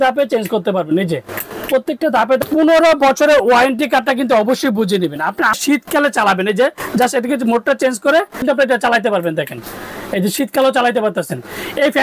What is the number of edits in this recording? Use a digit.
3